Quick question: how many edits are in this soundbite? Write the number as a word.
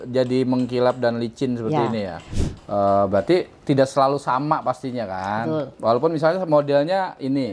one